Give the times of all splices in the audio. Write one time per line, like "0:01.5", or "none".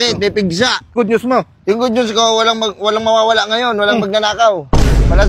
0:00.9